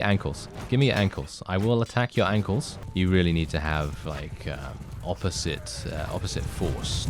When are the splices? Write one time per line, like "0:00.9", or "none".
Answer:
0:02.8